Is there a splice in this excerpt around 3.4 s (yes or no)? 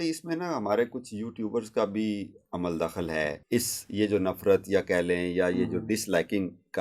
yes